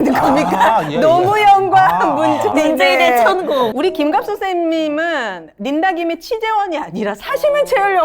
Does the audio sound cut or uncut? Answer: cut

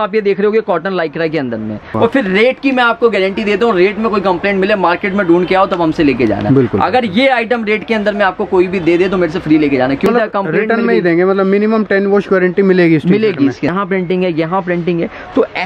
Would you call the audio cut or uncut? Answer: cut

